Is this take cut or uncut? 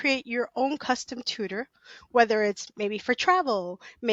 uncut